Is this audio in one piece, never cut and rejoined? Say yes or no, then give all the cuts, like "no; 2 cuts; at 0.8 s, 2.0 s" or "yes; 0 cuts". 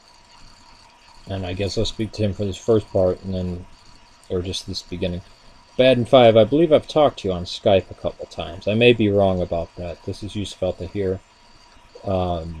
yes; 0 cuts